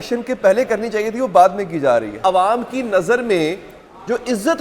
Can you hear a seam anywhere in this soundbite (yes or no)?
yes